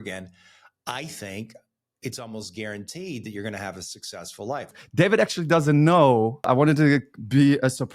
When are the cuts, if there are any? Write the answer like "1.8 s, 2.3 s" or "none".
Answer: 4.8 s, 6.5 s